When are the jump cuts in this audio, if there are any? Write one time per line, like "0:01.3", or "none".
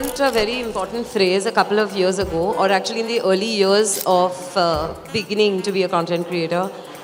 none